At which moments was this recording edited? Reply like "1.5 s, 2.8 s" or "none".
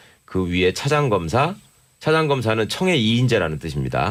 none